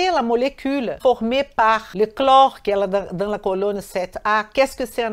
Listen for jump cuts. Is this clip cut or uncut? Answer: cut